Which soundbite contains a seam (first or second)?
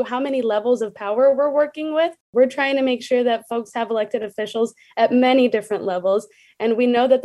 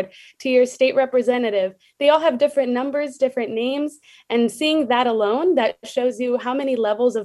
first